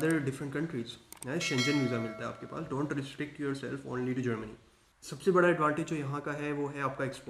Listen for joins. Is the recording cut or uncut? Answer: uncut